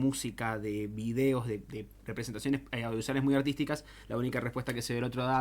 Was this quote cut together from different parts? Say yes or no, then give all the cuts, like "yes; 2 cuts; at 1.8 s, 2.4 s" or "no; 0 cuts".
no; 0 cuts